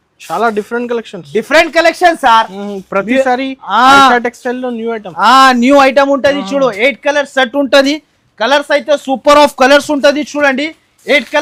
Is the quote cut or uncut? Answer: uncut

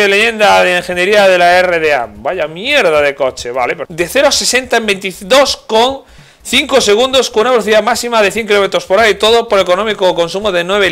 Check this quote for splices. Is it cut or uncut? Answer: cut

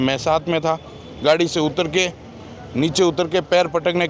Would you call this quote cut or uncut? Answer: uncut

